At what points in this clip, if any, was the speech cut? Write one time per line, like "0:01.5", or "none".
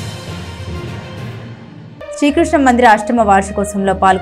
0:01.9